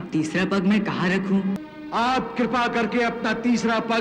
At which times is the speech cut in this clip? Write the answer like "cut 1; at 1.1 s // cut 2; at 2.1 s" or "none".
cut 1; at 1.7 s